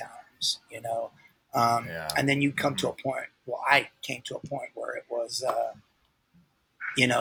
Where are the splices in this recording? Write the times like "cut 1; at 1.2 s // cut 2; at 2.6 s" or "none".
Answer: none